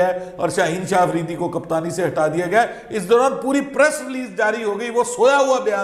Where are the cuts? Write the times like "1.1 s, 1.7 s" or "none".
none